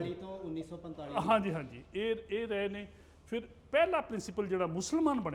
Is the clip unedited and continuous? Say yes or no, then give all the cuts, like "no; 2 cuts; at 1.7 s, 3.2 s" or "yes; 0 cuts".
yes; 0 cuts